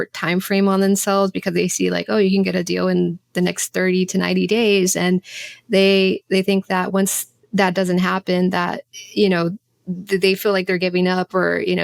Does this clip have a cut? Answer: no; 0 cuts

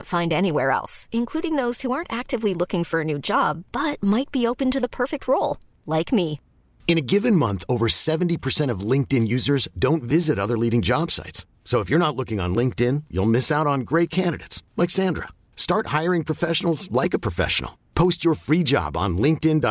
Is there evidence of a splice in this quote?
no; 0 cuts

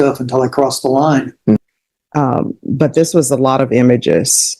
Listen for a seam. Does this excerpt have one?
yes; 1 cut; at 1.6 s

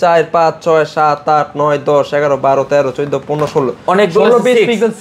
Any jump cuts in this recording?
no; 0 cuts

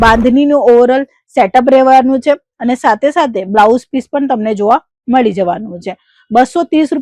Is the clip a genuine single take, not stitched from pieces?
yes; 0 cuts

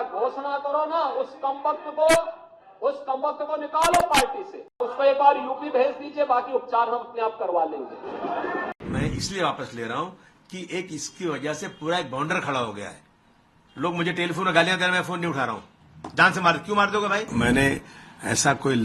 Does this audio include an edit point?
yes; 3 cuts; at 4.9 s, 8.7 s, 17.3 s

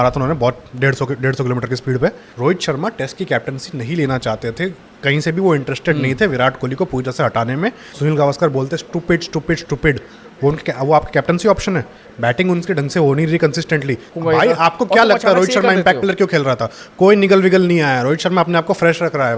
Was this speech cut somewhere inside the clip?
yes; 3 cuts; at 2.3 s, 7.9 s, 14.1 s

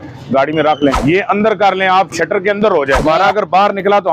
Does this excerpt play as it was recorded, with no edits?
no; 2 cuts; at 1.0 s, 3.0 s

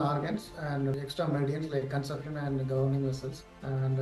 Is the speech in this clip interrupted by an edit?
no; 0 cuts

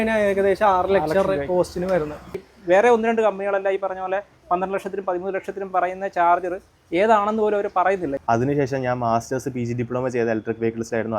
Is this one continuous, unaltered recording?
no; 2 cuts; at 2.5 s, 8.1 s

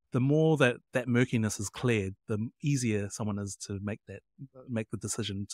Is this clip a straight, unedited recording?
yes; 0 cuts

